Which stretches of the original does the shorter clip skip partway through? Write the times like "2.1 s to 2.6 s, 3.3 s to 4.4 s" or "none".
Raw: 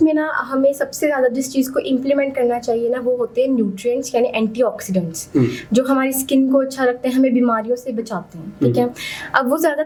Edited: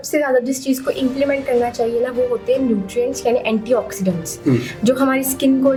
none